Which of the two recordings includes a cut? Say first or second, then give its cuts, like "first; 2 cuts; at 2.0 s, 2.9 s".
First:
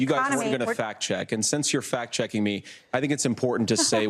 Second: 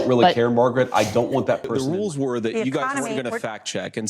second; 1 cut; at 1.7 s